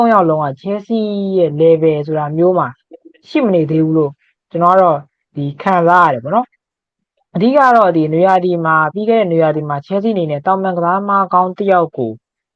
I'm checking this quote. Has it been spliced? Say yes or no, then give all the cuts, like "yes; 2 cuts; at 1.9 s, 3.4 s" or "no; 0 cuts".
no; 0 cuts